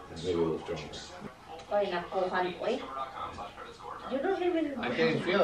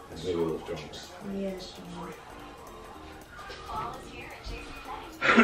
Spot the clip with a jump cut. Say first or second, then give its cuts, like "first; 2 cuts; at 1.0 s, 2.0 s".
first; 1 cut; at 1.1 s